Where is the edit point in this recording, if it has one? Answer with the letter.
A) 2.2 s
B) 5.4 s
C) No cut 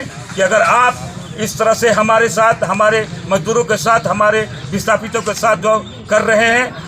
C